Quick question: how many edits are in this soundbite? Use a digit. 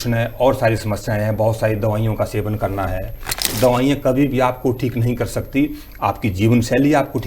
1